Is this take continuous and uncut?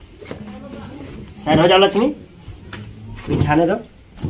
yes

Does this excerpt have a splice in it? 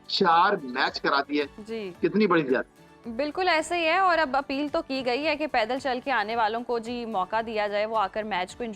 no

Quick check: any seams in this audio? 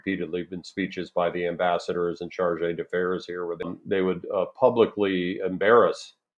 yes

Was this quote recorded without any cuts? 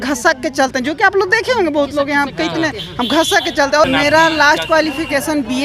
no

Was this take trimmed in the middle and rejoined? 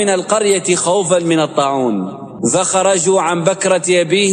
yes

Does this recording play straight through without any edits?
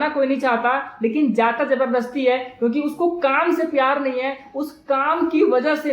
yes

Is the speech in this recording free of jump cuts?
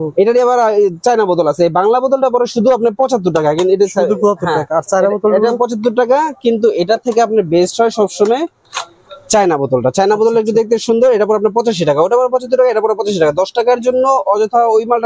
yes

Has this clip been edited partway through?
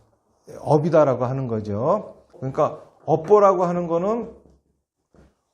yes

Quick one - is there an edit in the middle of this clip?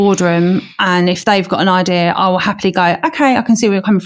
no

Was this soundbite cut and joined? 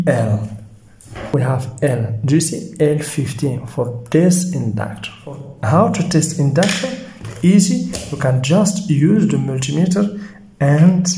yes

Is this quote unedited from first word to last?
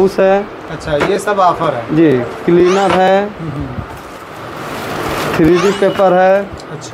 yes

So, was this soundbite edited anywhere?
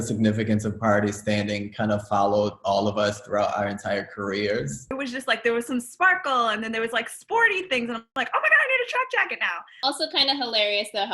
yes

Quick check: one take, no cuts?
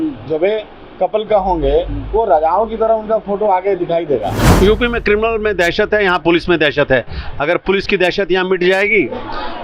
no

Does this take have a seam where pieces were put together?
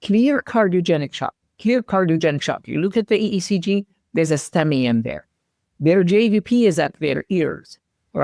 no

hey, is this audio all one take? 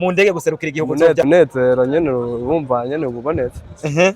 no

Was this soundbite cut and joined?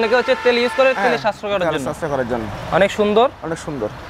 no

